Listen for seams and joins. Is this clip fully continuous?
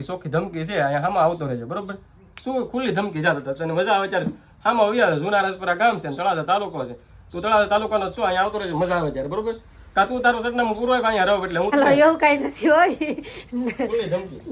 yes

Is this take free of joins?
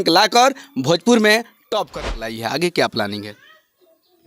no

